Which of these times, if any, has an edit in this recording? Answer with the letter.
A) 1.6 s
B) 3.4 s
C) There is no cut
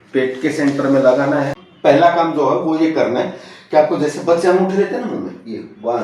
A